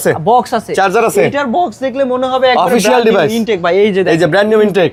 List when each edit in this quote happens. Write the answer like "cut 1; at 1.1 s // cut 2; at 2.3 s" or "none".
none